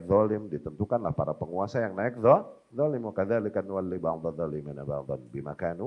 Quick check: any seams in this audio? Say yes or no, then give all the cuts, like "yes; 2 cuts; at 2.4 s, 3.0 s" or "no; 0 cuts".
no; 0 cuts